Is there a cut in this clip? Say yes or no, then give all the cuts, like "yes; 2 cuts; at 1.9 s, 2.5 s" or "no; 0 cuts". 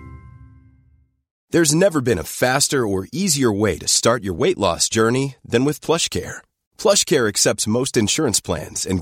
yes; 1 cut; at 1.3 s